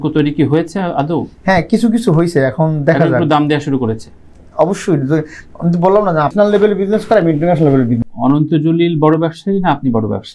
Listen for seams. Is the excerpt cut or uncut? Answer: cut